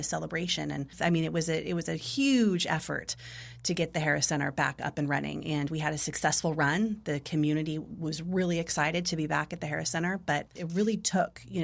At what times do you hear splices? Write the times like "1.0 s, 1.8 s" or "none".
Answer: 0.9 s, 10.6 s

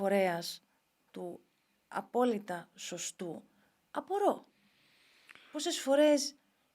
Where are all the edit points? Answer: none

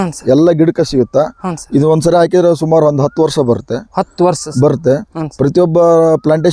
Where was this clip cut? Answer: none

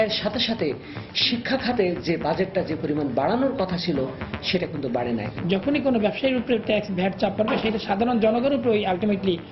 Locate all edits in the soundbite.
none

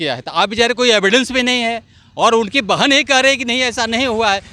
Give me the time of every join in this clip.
none

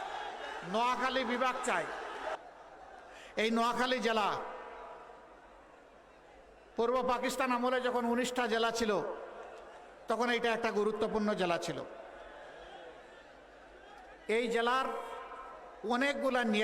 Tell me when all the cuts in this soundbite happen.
2.4 s

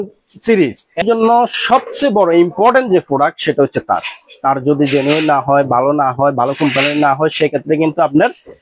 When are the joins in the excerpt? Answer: 1.0 s

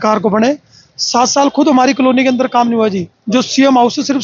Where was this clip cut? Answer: none

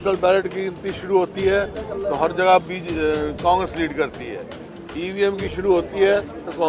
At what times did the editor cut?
none

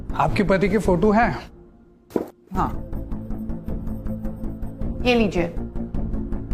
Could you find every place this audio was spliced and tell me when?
none

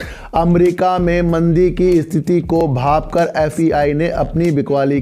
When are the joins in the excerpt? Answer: none

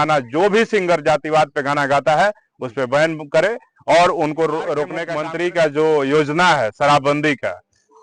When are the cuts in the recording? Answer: 5.0 s

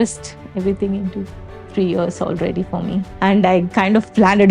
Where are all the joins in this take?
3.0 s

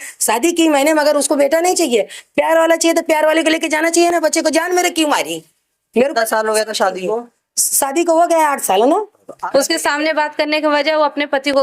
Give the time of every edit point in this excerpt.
9.3 s

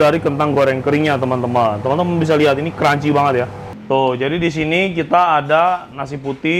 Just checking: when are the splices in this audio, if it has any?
3.7 s

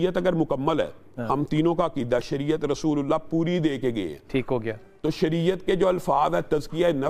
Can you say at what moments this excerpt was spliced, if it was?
none

